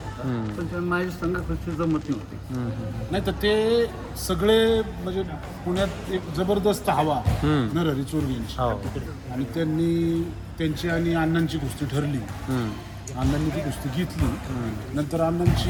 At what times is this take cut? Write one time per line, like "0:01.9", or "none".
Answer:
none